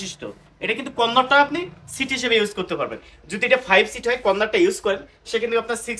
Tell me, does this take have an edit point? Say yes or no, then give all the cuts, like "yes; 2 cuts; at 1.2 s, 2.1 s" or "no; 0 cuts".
no; 0 cuts